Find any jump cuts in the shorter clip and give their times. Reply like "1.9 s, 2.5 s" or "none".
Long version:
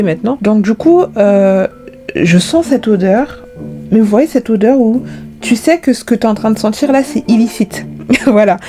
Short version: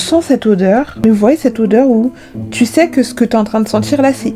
0.9 s